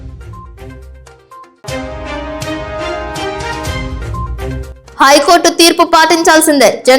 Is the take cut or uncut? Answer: cut